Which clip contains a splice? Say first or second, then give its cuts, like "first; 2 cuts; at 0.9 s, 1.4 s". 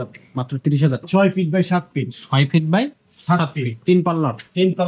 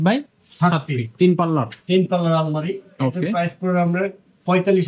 first; 1 cut; at 1.1 s